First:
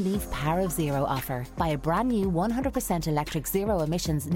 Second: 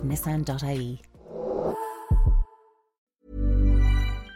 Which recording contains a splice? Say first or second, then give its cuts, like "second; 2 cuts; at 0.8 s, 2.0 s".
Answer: second; 1 cut; at 3.2 s